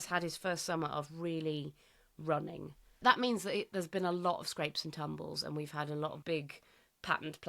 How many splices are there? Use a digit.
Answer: 1